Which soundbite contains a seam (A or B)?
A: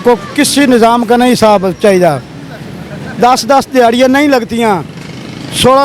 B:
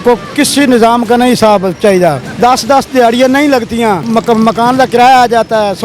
B